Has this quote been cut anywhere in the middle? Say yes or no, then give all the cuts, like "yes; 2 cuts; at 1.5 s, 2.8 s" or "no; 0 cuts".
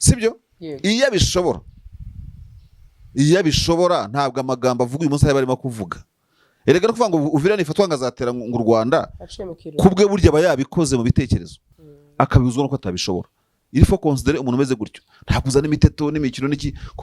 no; 0 cuts